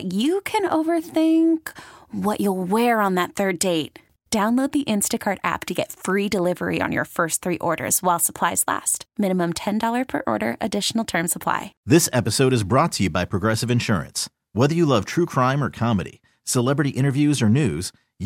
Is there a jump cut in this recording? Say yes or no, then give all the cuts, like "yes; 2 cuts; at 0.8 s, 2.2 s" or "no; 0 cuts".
yes; 1 cut; at 11.7 s